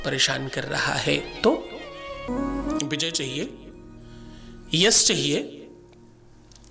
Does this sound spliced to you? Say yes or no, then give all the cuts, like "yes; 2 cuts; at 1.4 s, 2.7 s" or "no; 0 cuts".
yes; 1 cut; at 2.2 s